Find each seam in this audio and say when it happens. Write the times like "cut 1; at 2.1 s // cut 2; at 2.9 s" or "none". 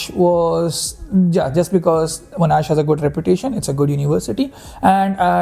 none